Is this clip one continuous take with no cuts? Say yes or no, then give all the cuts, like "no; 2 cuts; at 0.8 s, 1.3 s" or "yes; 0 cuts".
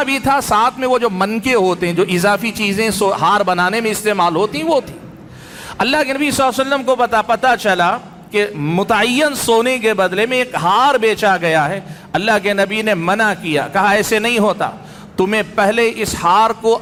yes; 0 cuts